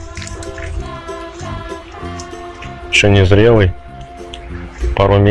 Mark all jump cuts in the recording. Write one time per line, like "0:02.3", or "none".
none